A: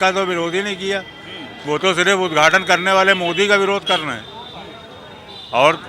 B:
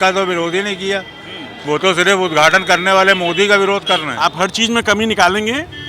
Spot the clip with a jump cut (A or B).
B